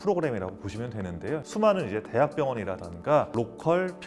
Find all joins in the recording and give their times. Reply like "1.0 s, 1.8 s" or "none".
1.4 s, 3.3 s